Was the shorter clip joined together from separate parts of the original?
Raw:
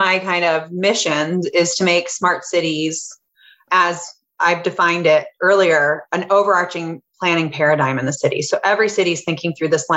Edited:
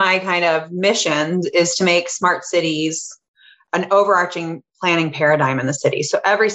yes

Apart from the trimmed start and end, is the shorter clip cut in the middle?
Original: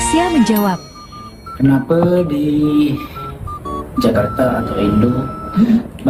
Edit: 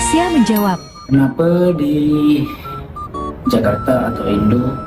yes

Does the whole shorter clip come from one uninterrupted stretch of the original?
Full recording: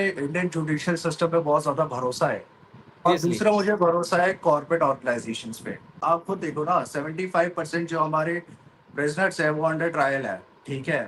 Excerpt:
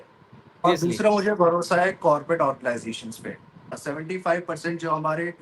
no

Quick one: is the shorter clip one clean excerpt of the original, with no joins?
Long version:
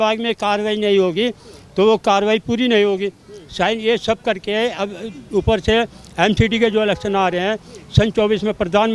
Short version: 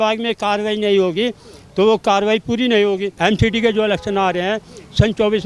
no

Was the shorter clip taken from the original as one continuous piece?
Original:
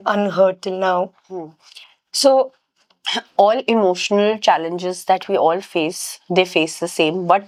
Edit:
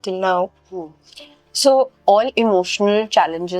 no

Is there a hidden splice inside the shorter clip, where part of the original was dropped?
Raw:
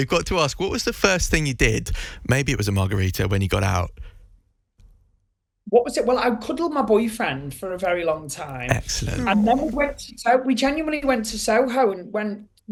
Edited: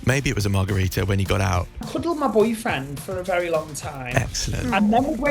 yes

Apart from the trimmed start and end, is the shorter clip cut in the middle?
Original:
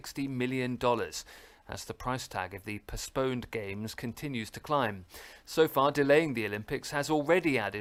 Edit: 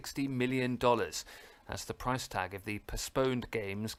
no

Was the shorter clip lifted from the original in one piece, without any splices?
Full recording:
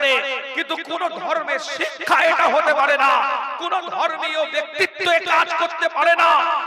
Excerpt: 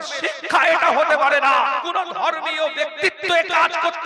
no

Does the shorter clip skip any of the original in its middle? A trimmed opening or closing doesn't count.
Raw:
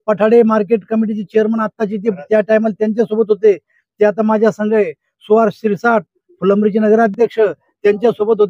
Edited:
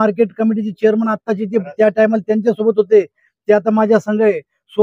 no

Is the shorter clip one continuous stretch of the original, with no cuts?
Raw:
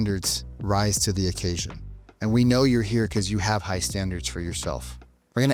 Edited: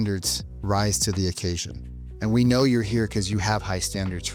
yes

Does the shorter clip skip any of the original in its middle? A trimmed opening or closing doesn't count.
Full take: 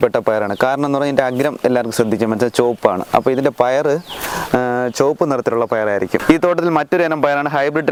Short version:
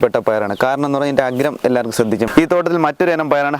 yes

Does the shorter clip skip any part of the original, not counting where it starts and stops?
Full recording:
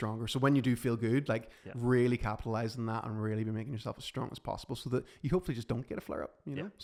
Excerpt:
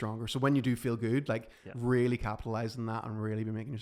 no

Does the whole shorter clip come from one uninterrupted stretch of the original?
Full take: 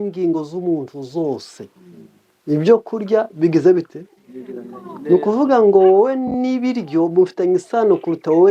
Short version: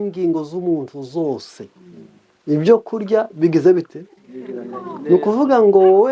yes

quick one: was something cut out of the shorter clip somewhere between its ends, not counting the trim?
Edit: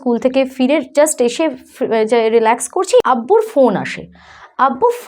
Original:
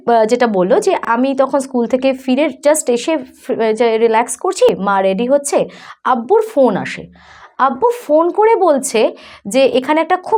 yes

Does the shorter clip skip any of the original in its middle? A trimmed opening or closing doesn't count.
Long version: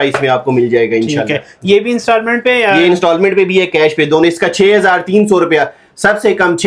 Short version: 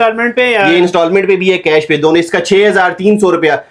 no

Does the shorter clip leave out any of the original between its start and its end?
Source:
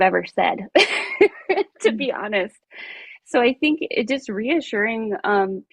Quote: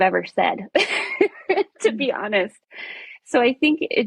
no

